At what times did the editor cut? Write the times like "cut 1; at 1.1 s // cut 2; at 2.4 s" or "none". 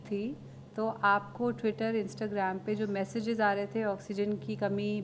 none